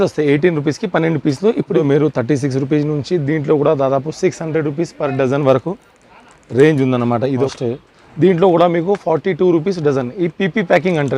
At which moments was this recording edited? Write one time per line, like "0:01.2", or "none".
0:01.8
0:07.5